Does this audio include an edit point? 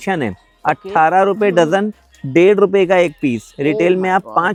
no; 0 cuts

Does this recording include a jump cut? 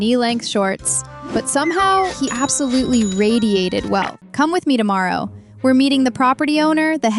yes; 1 cut; at 4.1 s

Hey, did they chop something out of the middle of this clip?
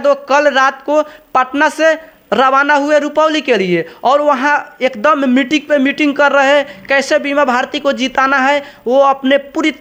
no; 0 cuts

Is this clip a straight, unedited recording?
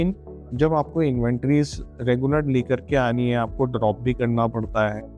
yes; 0 cuts

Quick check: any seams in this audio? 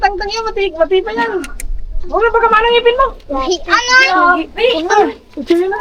no; 0 cuts

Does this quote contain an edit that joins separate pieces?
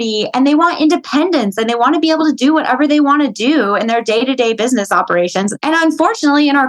yes; 1 cut; at 5.6 s

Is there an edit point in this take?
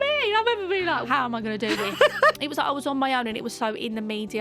yes; 2 cuts; at 1.1 s, 2.4 s

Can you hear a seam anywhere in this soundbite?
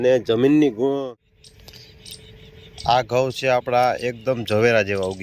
yes; 1 cut; at 1.0 s

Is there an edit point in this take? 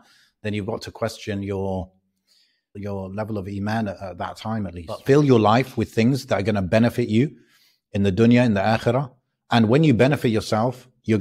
yes; 2 cuts; at 2.8 s, 5.0 s

